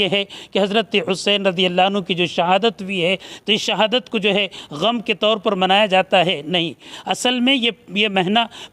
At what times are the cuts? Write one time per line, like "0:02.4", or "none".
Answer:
none